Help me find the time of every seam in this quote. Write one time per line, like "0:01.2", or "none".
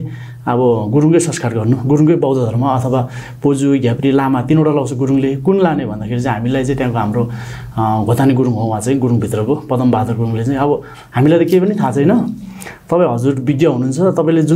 none